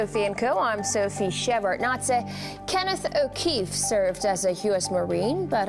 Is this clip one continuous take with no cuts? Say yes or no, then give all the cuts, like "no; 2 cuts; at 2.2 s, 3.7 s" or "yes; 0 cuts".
yes; 0 cuts